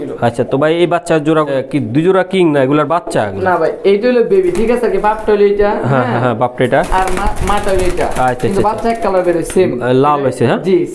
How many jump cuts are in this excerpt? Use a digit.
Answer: 1